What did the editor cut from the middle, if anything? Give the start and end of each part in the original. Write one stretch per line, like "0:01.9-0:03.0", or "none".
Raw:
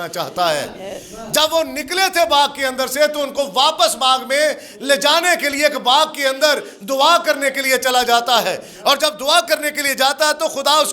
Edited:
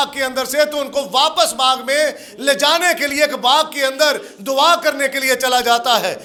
none